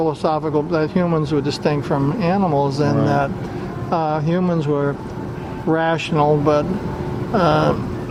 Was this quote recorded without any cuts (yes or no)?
yes